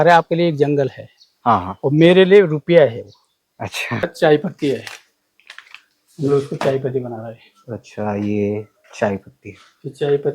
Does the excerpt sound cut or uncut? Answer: cut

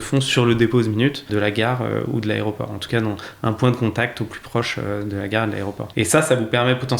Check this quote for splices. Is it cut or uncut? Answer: cut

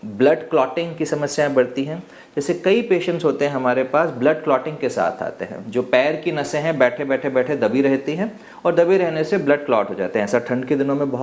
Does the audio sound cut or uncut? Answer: uncut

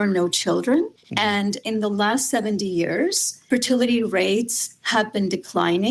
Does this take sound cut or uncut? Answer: cut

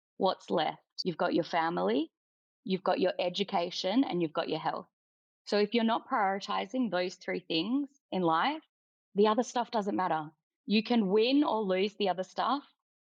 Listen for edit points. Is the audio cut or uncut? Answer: uncut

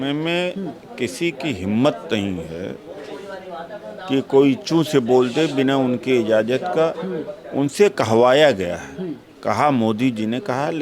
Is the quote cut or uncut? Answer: uncut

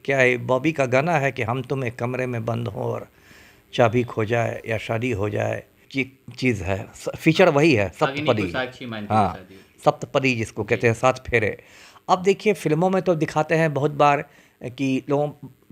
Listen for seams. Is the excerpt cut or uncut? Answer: cut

